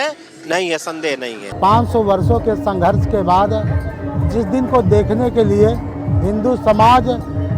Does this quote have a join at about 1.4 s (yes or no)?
yes